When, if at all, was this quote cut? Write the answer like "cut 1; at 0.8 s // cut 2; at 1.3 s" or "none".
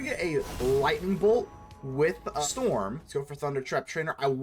cut 1; at 2.4 s // cut 2; at 3.0 s